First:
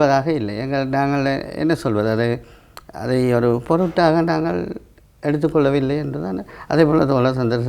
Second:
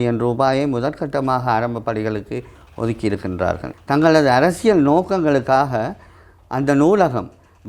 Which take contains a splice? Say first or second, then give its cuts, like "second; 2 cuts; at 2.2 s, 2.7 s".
second; 1 cut; at 3.7 s